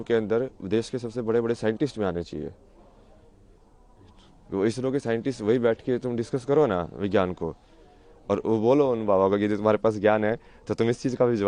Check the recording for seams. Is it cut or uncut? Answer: uncut